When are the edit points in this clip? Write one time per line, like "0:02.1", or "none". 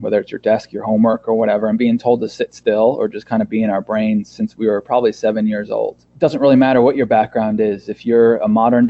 0:06.0